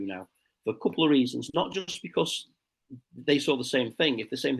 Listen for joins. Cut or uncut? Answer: uncut